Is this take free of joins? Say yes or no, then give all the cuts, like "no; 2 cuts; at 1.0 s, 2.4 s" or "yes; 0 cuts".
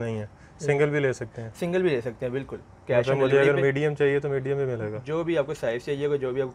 yes; 0 cuts